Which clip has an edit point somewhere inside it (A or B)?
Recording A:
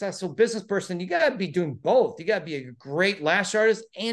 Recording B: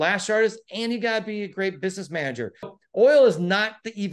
B